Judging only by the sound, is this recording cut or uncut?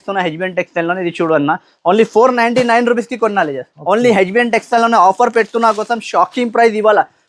cut